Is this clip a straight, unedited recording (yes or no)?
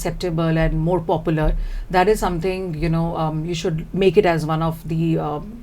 yes